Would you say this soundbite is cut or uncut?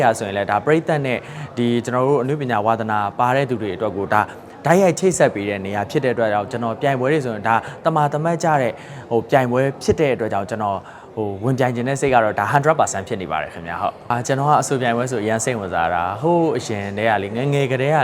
cut